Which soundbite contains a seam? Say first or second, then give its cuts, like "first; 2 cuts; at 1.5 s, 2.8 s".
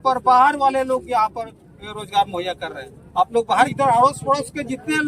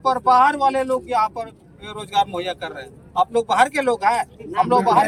first; 1 cut; at 3.7 s